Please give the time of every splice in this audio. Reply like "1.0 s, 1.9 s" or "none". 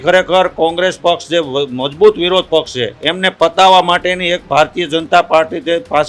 none